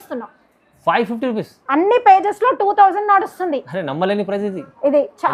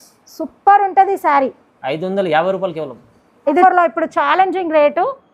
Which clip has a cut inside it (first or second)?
second